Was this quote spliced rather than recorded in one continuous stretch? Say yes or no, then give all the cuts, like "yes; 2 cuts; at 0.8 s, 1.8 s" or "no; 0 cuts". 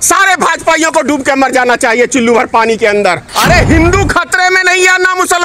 yes; 1 cut; at 3.3 s